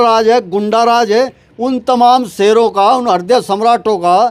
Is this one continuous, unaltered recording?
no; 1 cut; at 1.4 s

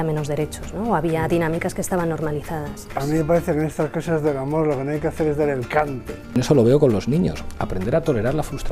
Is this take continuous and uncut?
no; 2 cuts; at 2.9 s, 6.3 s

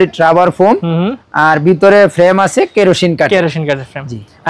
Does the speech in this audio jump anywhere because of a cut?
no; 0 cuts

